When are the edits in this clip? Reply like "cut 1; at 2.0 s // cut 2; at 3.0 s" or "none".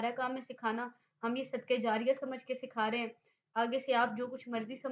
none